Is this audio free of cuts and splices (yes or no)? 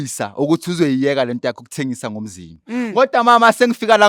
yes